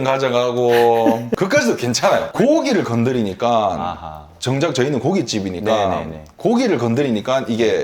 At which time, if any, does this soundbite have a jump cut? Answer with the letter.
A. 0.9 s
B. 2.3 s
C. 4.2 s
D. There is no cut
D